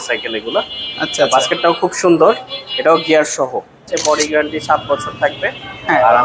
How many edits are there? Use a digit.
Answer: 1